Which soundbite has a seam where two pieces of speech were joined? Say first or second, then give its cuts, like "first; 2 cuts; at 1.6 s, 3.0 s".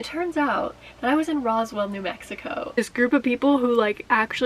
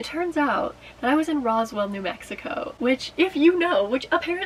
first; 1 cut; at 2.8 s